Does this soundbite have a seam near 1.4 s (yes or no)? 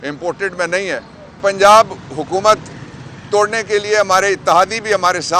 yes